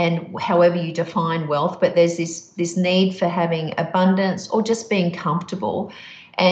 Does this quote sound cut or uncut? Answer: uncut